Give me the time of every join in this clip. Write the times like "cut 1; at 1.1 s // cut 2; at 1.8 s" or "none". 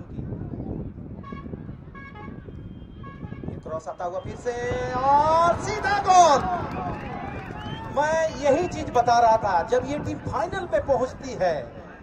none